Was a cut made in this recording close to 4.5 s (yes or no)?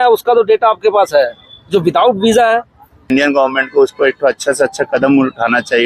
no